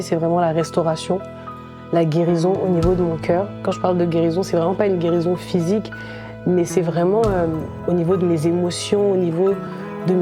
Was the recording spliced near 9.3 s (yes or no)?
no